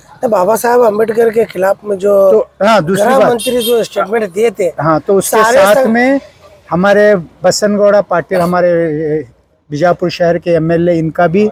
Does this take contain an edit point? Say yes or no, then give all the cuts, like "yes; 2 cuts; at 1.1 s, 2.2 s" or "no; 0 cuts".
no; 0 cuts